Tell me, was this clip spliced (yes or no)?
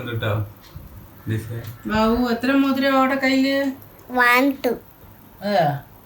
yes